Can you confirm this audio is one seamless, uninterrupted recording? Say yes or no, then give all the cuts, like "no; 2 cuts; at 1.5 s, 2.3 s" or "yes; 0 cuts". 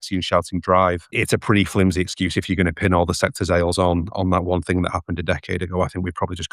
no; 1 cut; at 1.1 s